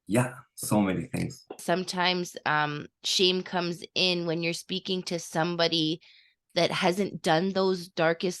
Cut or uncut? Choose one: cut